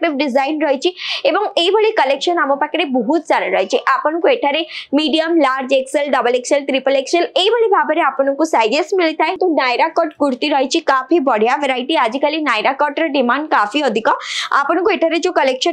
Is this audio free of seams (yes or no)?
no